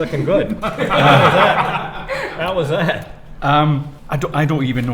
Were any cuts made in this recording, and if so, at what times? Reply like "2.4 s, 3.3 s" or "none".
3.9 s